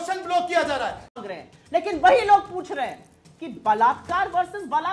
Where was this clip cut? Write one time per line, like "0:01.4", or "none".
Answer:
0:01.2